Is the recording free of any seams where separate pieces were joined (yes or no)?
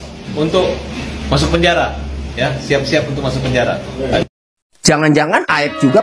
yes